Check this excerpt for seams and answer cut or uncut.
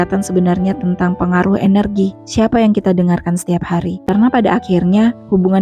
cut